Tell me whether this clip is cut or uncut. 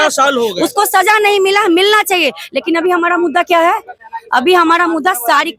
uncut